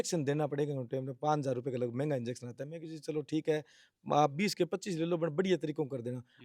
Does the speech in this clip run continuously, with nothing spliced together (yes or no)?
yes